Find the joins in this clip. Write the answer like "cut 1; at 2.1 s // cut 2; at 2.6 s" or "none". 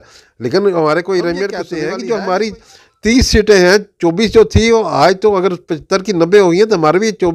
cut 1; at 1.6 s